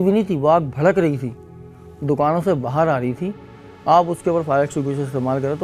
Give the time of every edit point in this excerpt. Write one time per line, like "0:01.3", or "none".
none